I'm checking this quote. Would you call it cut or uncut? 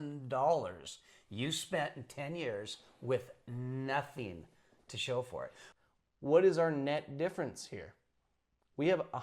cut